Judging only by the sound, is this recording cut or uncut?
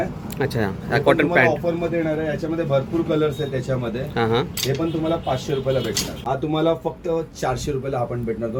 cut